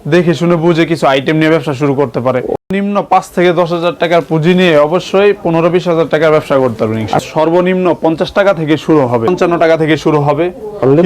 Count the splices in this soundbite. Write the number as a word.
three